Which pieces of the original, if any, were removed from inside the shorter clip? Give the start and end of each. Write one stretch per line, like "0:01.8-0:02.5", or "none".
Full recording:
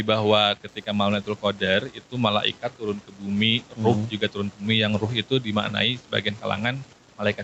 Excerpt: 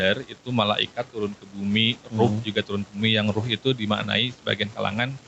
none